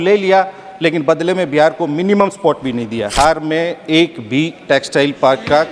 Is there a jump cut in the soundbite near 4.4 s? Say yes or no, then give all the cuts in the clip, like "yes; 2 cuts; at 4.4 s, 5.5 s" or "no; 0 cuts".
no; 1 cut; at 3.1 s